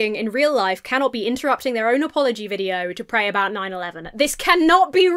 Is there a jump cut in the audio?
no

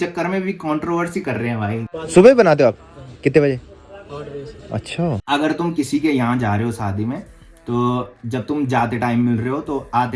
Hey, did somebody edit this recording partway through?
yes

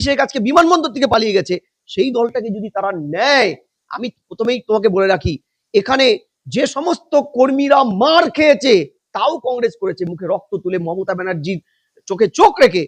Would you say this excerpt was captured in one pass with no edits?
yes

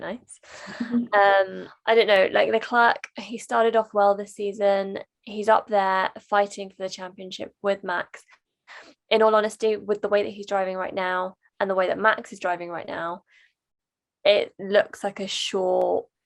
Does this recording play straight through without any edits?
no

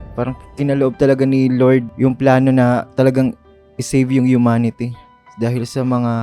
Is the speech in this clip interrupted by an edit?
yes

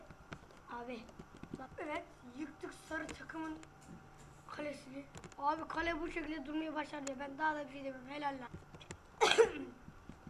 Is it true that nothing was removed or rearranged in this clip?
no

